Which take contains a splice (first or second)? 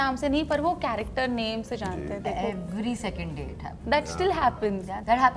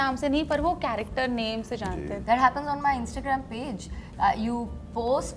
second